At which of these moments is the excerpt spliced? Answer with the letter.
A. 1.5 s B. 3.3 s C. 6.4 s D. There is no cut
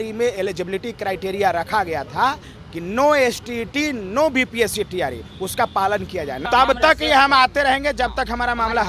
C